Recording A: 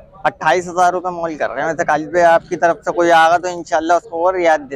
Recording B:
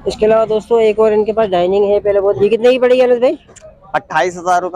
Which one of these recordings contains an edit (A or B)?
B